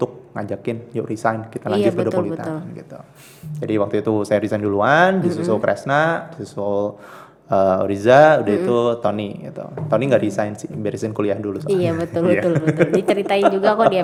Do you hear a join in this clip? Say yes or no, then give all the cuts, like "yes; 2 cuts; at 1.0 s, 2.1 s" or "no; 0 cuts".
no; 0 cuts